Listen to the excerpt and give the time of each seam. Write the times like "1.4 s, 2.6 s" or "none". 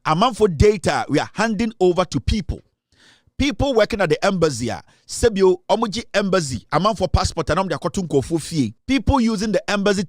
8.8 s